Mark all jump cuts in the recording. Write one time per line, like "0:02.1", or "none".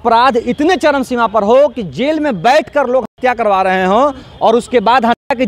none